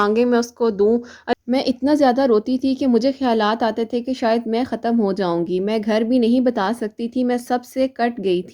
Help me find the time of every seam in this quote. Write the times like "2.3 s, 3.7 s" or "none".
1.4 s